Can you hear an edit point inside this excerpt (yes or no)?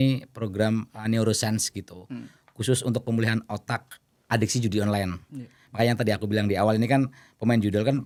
no